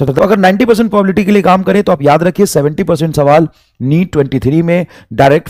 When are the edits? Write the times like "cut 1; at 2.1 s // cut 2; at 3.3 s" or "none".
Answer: none